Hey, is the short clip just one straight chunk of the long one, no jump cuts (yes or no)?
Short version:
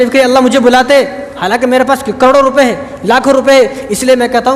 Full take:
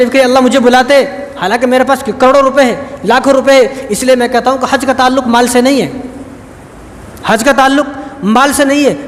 yes